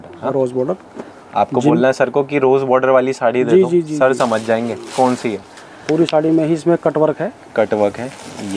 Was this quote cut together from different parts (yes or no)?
no